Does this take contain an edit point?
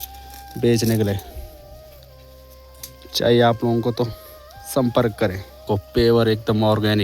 yes; 1 cut; at 5.7 s

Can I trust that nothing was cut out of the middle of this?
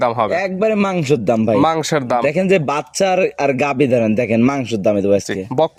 yes; 0 cuts

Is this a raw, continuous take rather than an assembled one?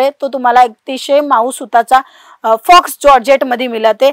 yes; 0 cuts

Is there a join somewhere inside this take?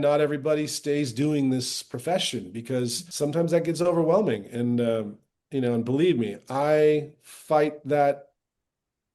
yes; 1 cut; at 3.0 s

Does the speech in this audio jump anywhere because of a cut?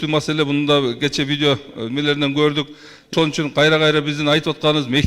yes; 1 cut; at 3.1 s

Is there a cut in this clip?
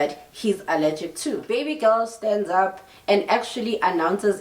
yes; 1 cut; at 1.4 s

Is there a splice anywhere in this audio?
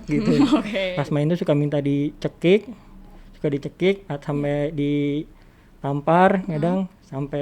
yes; 1 cut; at 0.9 s

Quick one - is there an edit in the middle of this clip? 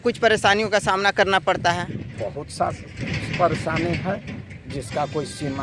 no; 0 cuts

